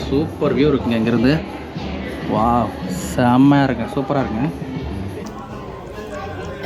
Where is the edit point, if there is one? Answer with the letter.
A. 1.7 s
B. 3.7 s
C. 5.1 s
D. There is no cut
C